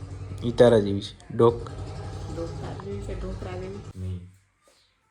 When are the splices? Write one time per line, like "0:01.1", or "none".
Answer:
0:03.9